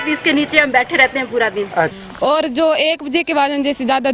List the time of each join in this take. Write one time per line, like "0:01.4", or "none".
0:02.0

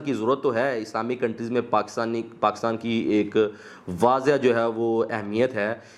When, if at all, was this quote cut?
none

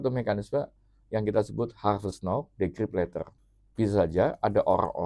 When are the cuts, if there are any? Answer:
0:03.4

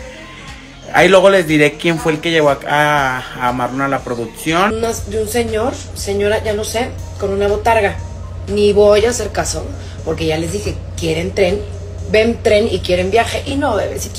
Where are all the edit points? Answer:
0:04.7

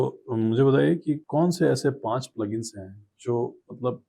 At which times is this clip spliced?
0:01.2

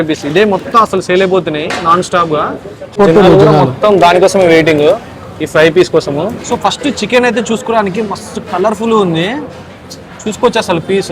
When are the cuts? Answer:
0:03.0
0:06.4

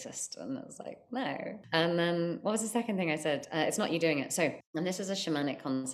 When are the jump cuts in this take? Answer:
0:01.6
0:04.6

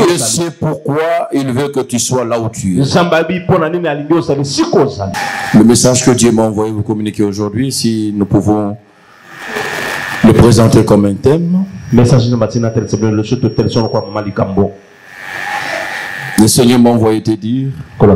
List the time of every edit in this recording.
0:05.0

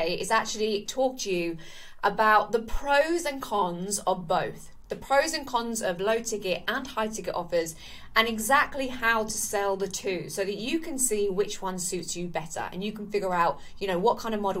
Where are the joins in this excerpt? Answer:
none

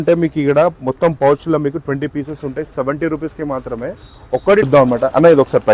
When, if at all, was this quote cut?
0:04.7

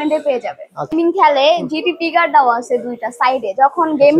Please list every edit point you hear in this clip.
0:00.9

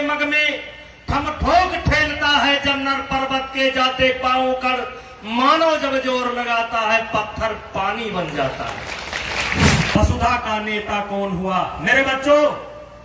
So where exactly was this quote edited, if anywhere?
0:10.0

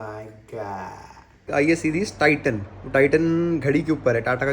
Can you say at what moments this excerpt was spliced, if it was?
0:01.5

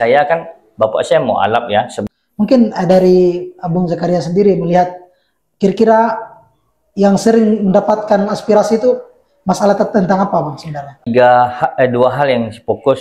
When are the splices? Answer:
0:02.0
0:11.0

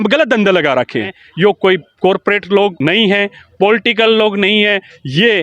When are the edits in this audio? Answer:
0:01.2

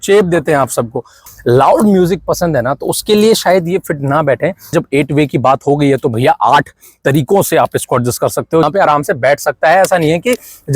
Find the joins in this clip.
0:01.2
0:04.7
0:08.6

